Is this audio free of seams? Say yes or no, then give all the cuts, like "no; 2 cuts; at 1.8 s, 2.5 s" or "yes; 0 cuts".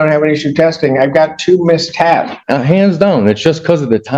no; 1 cut; at 2.4 s